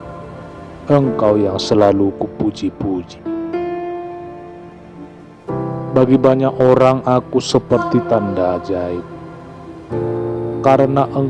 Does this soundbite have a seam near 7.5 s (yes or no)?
no